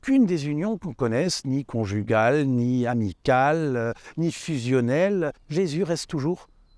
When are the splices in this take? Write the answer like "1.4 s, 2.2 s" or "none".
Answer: 5.4 s